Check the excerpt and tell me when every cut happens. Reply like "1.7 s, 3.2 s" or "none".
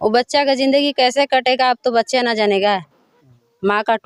none